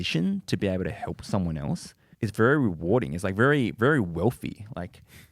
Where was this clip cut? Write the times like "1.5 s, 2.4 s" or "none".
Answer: 2.0 s